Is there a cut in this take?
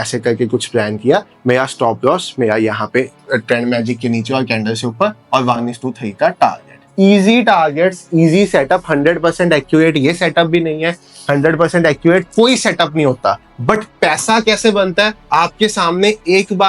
no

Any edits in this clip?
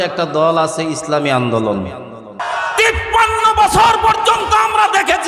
yes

